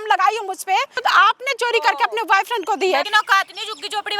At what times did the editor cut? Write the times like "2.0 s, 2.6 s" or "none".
1.0 s, 3.1 s